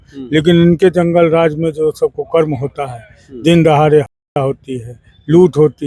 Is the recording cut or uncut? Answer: uncut